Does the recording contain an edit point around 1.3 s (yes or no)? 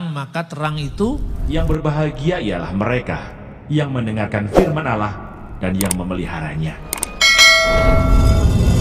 yes